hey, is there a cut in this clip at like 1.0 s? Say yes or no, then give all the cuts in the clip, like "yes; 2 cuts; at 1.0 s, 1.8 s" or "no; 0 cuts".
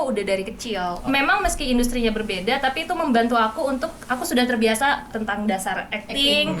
yes; 2 cuts; at 1.0 s, 5.1 s